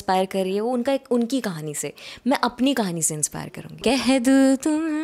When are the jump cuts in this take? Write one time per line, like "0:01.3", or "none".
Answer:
0:03.7